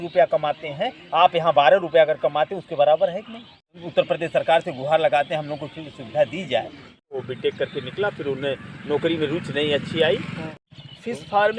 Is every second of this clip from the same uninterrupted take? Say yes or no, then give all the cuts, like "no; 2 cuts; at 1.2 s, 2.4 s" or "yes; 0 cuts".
no; 3 cuts; at 3.8 s, 7.2 s, 10.4 s